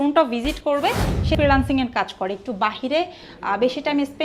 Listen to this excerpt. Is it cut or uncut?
cut